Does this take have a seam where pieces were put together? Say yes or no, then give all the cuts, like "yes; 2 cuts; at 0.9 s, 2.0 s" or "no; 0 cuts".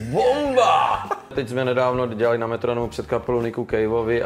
yes; 1 cut; at 1.3 s